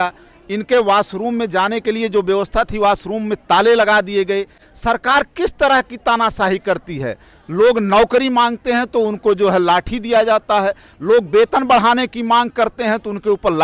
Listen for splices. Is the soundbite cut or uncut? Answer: uncut